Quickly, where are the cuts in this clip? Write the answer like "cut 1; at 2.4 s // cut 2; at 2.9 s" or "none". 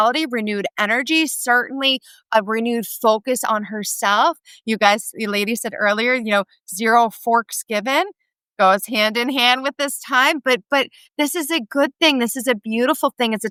none